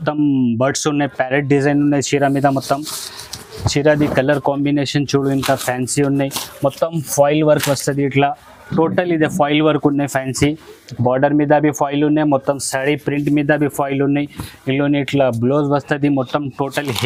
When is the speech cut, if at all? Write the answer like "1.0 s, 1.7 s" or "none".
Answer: none